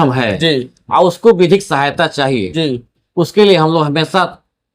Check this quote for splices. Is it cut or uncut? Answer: uncut